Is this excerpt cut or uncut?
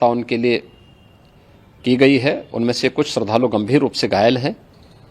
uncut